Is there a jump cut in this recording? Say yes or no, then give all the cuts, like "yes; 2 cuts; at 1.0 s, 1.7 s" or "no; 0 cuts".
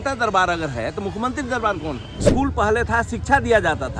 yes; 1 cut; at 2.3 s